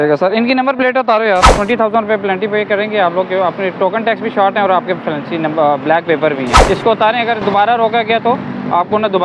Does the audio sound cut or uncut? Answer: cut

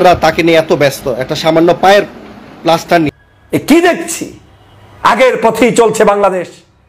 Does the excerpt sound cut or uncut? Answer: cut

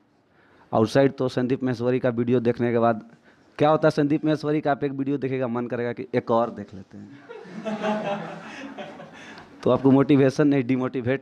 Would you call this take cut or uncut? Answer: uncut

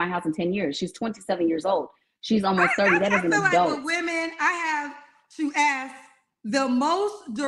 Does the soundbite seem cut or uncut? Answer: cut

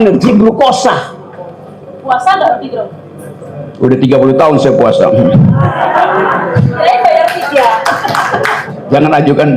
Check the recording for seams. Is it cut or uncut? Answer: cut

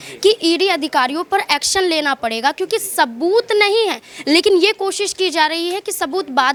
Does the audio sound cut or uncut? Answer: uncut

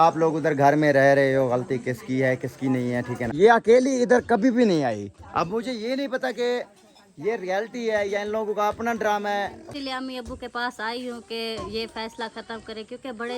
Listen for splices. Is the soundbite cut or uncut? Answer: cut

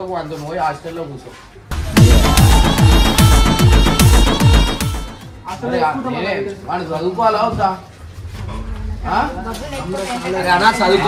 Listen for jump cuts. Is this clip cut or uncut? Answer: uncut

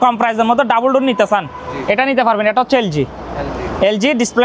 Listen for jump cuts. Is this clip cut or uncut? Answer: uncut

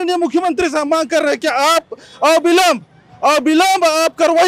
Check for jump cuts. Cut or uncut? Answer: uncut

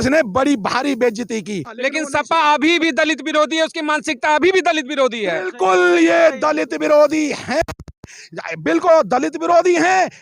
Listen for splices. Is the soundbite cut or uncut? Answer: cut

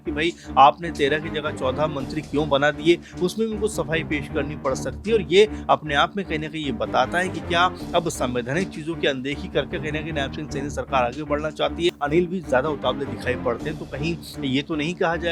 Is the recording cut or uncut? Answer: cut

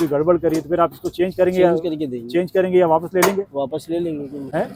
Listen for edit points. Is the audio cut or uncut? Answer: uncut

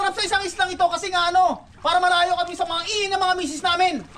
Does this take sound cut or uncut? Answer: uncut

